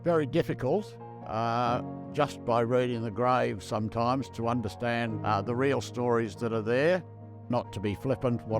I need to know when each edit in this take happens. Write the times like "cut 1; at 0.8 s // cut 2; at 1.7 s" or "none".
cut 1; at 5.1 s // cut 2; at 7.5 s